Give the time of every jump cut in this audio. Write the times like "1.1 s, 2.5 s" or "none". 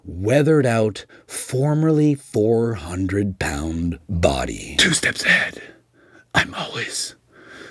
4.7 s